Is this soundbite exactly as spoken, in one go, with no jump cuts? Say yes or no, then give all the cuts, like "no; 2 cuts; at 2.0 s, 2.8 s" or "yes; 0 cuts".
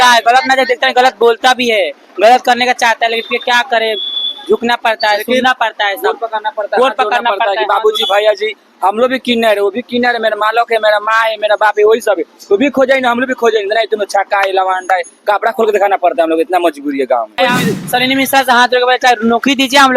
no; 1 cut; at 17.3 s